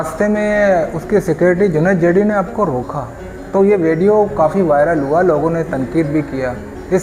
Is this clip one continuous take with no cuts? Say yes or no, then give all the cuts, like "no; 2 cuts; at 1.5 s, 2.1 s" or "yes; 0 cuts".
yes; 0 cuts